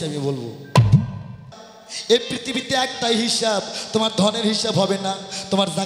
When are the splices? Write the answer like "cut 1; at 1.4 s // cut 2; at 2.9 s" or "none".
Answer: cut 1; at 1.5 s